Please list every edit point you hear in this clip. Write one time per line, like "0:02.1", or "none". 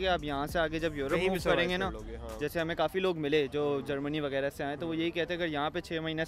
none